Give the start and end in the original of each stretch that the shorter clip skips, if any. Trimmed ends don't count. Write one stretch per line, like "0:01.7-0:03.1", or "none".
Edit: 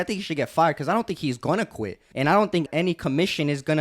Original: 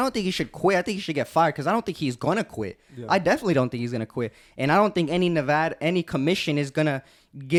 0:02.8-0:04.4
0:05.1-0:05.8